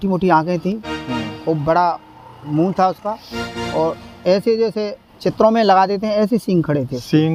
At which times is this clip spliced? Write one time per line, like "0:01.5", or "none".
none